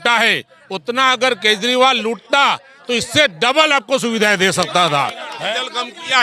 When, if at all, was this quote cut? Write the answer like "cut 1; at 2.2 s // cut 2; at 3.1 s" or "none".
cut 1; at 5.3 s